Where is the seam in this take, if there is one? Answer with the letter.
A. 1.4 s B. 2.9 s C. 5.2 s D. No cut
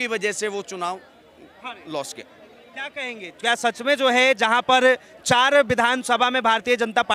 D